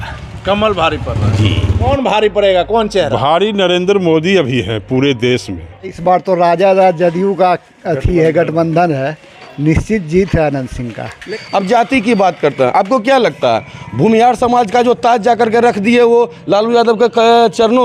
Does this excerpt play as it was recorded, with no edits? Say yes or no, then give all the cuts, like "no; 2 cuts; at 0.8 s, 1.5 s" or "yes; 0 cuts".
no; 3 cuts; at 1.9 s, 6.0 s, 11.2 s